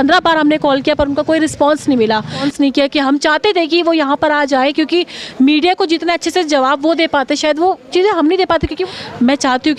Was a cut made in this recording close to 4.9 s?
no; 2 cuts; at 2.5 s, 8.8 s

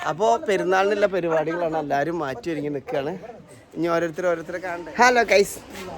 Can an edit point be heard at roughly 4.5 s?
yes; 1 cut; at 4.5 s

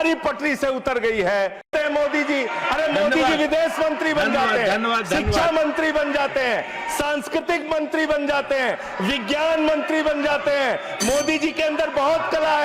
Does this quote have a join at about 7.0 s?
no; 1 cut; at 1.7 s

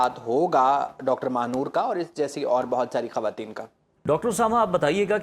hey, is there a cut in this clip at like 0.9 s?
no; 0 cuts

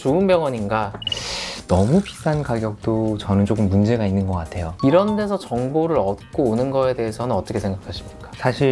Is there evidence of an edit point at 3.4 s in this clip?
no; 2 cuts; at 1.0 s, 4.6 s

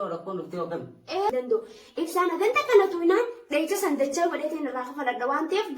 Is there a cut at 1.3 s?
yes; 1 cut; at 1.3 s

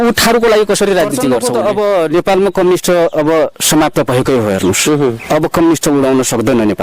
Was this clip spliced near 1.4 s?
yes; 1 cut; at 1.4 s

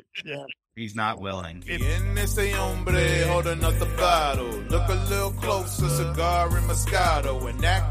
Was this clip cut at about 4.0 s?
no; 1 cut; at 1.6 s

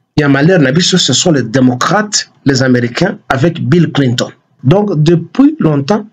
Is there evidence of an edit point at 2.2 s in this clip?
no; 1 cut; at 4.5 s

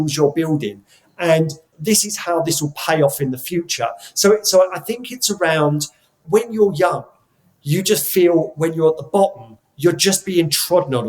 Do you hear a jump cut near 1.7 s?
yes; 2 cuts; at 1.7 s, 6.2 s

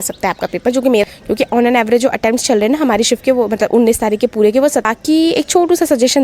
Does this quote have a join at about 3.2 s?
no; 2 cuts; at 1.0 s, 4.9 s

